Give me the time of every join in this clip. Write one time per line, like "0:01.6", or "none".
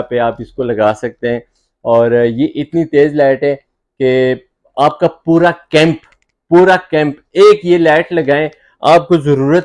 none